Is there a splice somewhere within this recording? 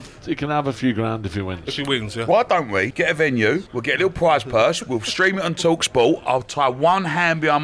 yes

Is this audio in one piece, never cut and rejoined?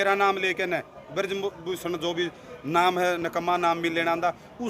yes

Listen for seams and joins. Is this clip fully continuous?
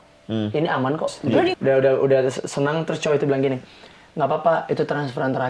no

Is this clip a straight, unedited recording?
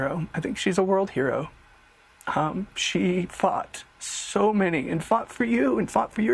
yes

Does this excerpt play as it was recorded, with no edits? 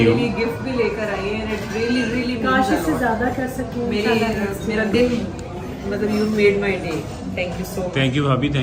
yes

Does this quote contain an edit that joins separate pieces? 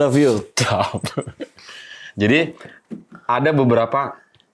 no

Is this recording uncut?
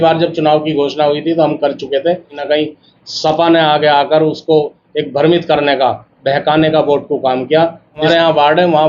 no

